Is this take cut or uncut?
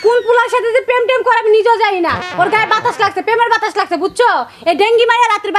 uncut